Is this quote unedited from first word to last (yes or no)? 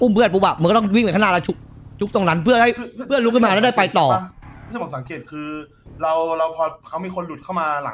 yes